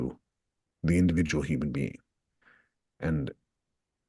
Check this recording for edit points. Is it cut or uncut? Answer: uncut